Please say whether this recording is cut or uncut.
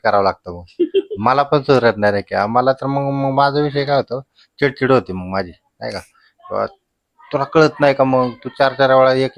uncut